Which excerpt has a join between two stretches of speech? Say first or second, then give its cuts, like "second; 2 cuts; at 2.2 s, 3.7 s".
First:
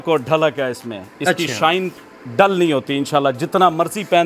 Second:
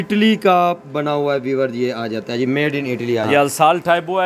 second; 1 cut; at 3.3 s